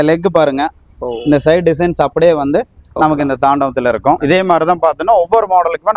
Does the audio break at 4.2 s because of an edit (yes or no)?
yes